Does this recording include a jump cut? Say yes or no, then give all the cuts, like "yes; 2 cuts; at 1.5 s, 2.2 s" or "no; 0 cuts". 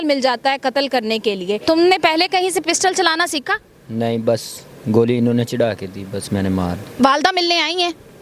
yes; 2 cuts; at 1.6 s, 7.0 s